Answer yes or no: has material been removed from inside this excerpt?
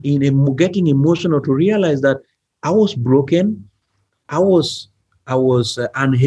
no